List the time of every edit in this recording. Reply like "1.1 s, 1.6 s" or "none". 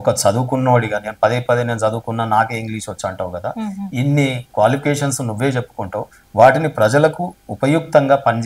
none